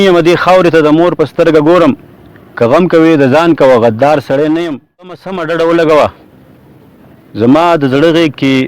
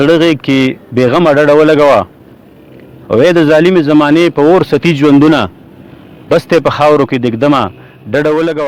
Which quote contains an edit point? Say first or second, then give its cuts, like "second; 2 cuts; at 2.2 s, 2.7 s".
first; 1 cut; at 5.3 s